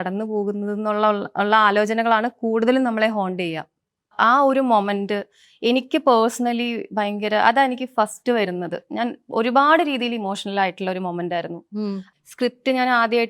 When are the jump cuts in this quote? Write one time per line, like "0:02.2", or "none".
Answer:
0:04.1
0:11.8